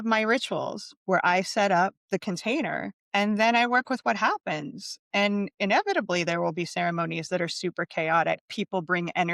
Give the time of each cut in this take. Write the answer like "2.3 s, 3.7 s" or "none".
2.0 s, 3.0 s